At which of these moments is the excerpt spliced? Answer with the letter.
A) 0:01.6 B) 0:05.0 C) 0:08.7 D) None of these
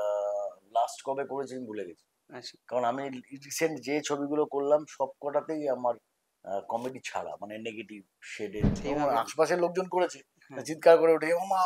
C